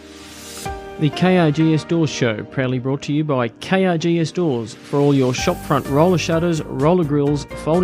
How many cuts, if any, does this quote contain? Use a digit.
1